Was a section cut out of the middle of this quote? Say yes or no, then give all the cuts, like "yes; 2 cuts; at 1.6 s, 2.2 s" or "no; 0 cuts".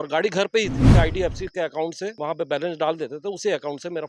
yes; 2 cuts; at 0.9 s, 2.2 s